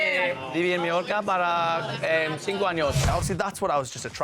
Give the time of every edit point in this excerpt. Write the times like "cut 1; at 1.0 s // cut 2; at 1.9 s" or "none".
cut 1; at 3.1 s